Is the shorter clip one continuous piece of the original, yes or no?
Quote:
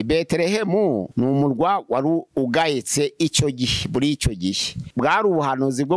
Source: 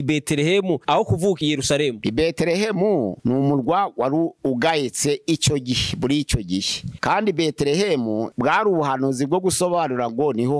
no